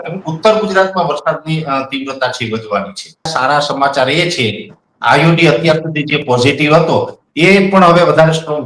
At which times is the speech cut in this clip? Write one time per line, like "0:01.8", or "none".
0:03.3